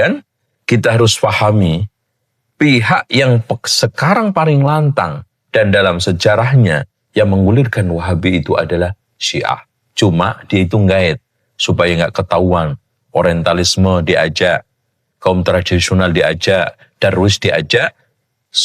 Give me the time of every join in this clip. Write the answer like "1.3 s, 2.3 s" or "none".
none